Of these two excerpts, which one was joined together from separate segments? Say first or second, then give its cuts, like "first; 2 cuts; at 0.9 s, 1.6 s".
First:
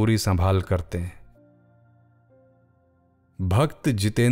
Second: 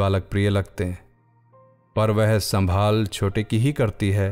first; 2 cuts; at 1.3 s, 2.7 s